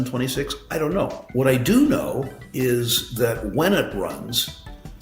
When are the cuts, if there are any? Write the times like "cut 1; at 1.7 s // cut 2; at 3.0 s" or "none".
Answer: cut 1; at 1.2 s